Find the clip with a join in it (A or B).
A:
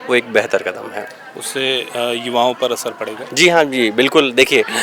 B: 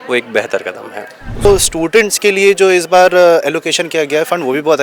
B